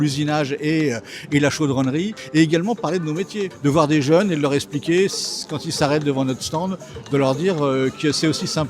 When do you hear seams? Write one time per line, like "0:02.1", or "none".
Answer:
0:02.2
0:03.5